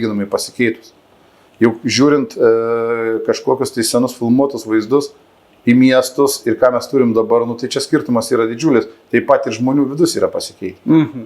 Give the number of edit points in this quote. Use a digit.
0